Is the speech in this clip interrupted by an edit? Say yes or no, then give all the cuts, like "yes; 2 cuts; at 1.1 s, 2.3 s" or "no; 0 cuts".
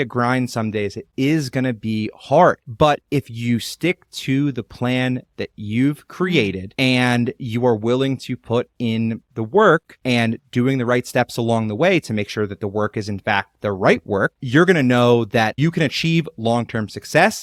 no; 0 cuts